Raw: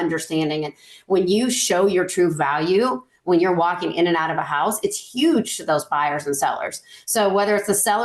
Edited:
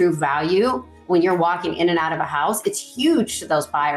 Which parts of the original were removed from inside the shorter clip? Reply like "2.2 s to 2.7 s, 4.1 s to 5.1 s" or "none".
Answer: none